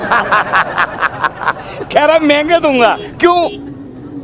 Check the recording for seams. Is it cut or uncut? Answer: uncut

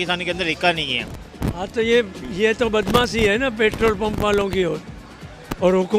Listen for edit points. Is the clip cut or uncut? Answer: cut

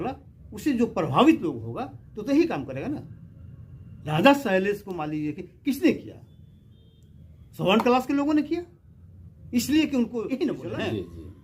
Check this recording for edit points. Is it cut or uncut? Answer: cut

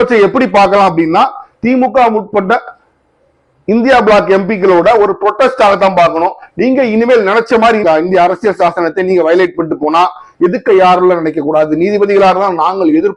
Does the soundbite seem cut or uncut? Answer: uncut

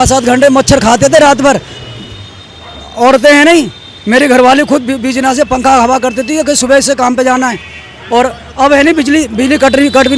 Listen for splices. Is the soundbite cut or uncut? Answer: uncut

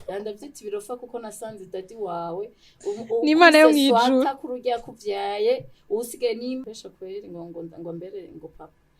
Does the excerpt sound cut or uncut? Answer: cut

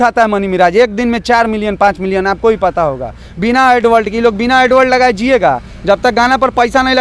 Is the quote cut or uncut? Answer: uncut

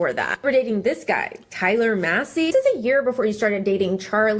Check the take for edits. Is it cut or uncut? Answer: cut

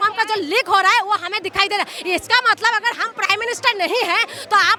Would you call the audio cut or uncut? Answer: uncut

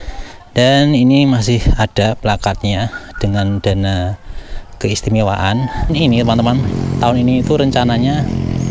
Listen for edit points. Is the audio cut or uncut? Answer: cut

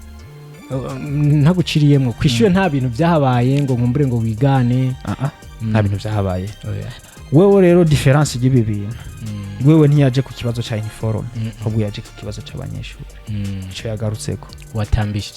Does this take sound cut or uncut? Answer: cut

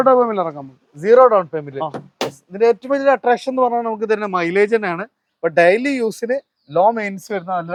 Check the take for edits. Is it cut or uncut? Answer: uncut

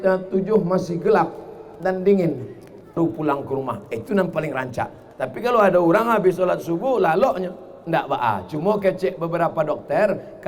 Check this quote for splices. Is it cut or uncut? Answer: cut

